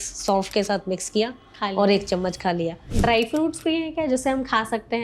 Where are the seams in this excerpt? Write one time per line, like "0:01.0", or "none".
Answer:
0:02.9